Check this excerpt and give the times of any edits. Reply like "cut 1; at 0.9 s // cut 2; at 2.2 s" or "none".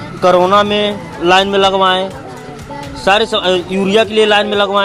none